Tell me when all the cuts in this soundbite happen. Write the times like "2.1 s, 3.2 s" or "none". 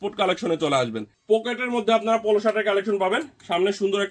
1.1 s

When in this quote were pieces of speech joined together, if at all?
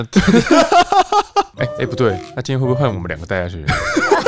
1.5 s, 2.3 s

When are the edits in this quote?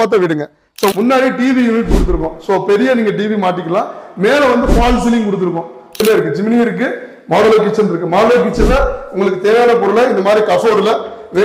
0.9 s, 6.0 s

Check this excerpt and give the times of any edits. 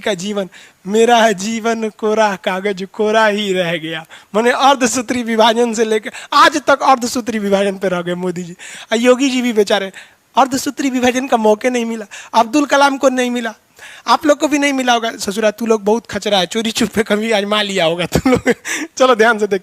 none

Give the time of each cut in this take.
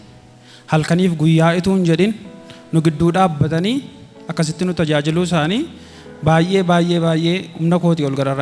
none

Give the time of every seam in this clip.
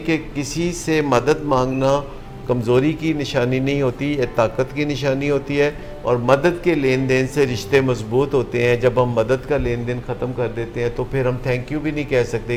none

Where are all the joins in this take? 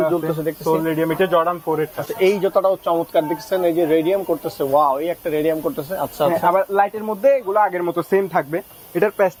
none

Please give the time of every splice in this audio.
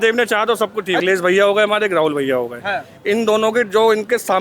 1.0 s

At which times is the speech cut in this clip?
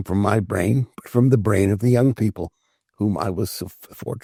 none

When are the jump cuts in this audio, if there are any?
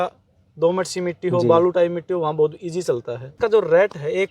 3.4 s

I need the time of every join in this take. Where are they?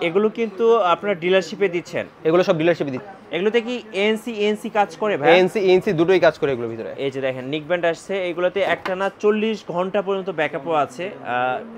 2.9 s

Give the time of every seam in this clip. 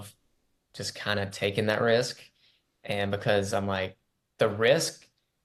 none

